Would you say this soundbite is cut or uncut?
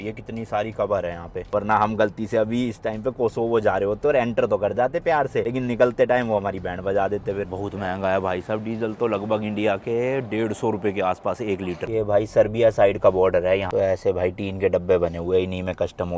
cut